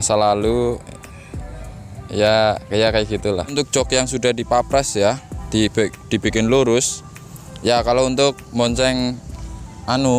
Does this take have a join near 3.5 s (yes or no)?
yes